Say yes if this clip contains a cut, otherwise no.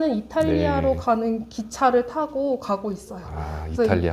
no